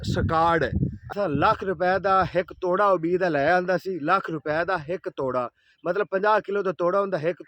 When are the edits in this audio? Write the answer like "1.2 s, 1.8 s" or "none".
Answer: 1.0 s